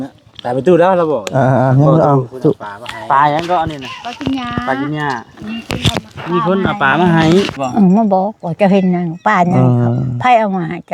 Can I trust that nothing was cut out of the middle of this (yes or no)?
no